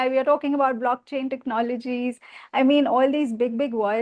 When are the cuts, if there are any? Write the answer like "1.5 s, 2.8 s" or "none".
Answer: none

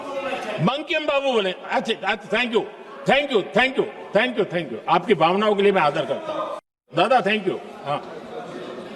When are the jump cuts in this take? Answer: 6.9 s

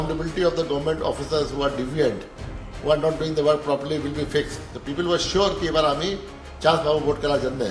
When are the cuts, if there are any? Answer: none

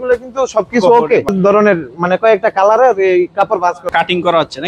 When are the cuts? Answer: 1.3 s, 3.9 s

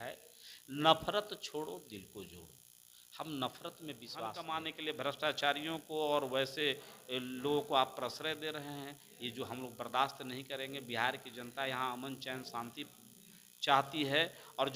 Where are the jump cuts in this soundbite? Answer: 4.5 s

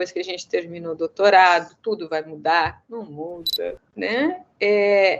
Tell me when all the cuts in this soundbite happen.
3.8 s

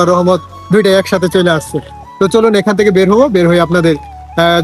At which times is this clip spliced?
none

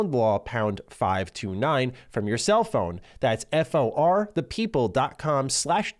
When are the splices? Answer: none

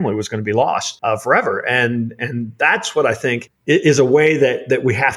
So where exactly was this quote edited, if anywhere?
0.9 s, 3.5 s

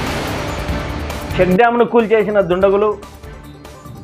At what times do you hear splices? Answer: 1.3 s

